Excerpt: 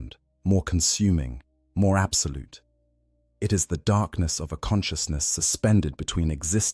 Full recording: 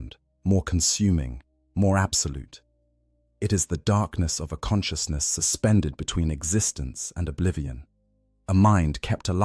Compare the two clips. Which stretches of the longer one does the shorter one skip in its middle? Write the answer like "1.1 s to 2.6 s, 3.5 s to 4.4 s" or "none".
none